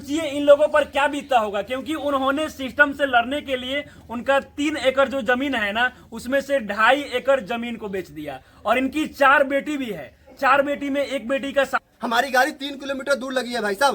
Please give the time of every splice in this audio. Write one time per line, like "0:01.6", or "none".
0:11.7